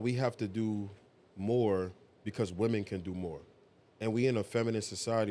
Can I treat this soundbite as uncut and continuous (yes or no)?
yes